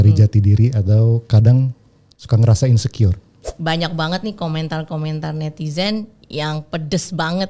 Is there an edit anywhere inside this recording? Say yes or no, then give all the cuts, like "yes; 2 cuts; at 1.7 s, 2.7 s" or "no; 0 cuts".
yes; 1 cut; at 3.5 s